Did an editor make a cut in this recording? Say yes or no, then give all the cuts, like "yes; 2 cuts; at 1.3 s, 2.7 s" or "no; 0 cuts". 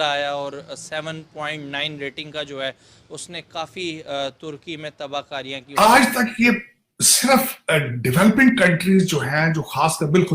yes; 1 cut; at 5.6 s